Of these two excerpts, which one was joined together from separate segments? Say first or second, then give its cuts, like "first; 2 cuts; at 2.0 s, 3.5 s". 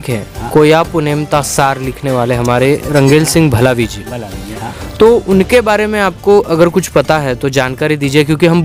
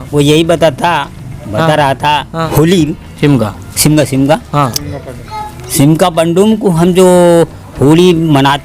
second; 1 cut; at 2.5 s